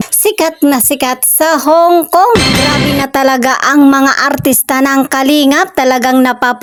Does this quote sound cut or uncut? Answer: uncut